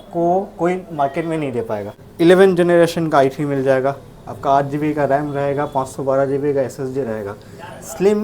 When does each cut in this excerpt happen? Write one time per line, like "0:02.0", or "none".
0:02.0